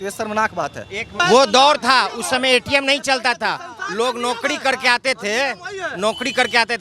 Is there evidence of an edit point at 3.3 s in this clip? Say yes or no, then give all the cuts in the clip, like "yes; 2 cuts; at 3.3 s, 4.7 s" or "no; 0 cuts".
no; 1 cut; at 1.2 s